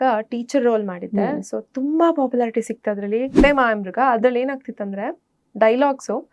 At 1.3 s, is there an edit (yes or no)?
no